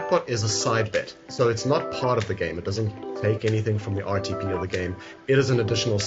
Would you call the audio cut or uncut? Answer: uncut